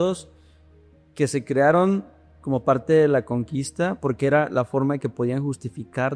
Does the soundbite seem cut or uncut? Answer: uncut